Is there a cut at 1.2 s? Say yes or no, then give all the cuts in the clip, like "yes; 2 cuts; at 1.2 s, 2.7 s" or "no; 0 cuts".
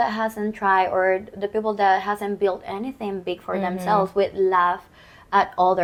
no; 0 cuts